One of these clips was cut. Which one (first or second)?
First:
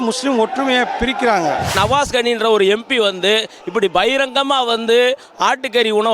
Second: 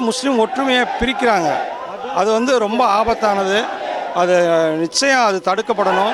first